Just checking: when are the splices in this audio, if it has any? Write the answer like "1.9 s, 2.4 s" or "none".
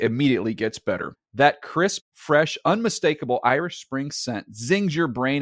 none